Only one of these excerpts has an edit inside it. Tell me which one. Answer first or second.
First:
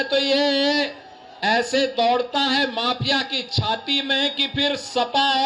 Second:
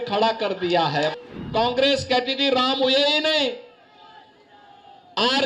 second